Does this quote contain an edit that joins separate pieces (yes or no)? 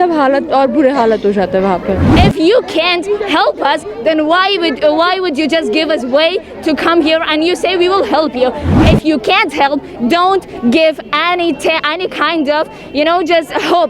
yes